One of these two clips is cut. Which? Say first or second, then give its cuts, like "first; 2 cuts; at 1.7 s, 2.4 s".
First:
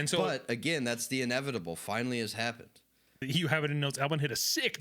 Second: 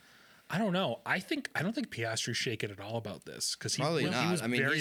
first; 1 cut; at 3.2 s